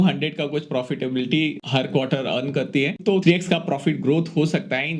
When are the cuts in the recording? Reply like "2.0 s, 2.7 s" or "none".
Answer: 1.6 s, 3.0 s